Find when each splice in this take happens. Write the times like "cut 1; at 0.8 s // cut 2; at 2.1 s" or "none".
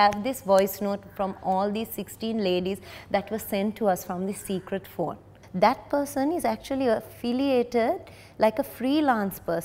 cut 1; at 5.4 s